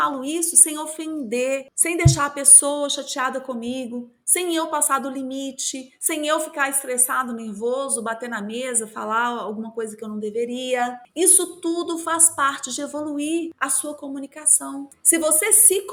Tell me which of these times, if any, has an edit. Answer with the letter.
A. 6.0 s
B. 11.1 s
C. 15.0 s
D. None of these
D